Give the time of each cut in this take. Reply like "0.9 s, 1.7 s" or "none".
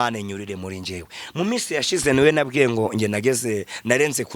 none